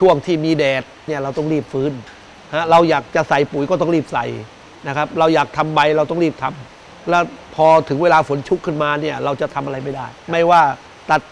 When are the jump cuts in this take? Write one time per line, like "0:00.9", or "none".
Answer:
0:01.0